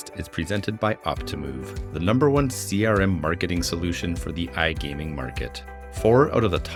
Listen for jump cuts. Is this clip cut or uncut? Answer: uncut